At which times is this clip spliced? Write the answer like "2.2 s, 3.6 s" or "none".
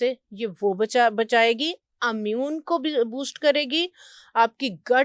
none